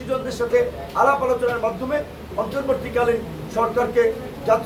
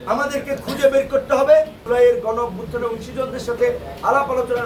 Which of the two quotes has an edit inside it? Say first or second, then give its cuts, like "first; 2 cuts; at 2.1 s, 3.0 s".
second; 1 cut; at 1.8 s